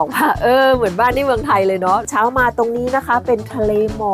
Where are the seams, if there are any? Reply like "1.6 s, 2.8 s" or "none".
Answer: 2.0 s